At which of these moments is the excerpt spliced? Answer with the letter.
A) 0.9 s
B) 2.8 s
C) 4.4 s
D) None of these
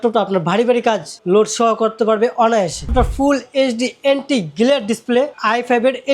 B